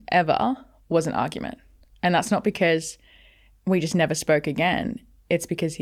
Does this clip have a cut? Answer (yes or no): no